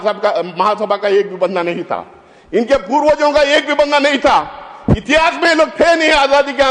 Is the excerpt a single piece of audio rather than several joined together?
yes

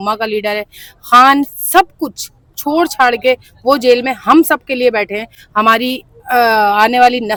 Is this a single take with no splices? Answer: yes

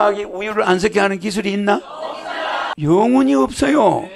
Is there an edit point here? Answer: no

